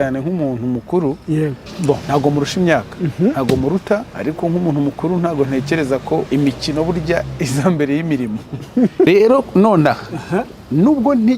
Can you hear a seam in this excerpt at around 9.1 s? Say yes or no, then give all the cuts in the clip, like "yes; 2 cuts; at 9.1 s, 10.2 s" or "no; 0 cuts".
yes; 4 cuts; at 1.7 s, 4.1 s, 6.3 s, 9.1 s